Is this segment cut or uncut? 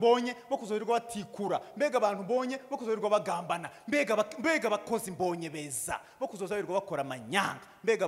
uncut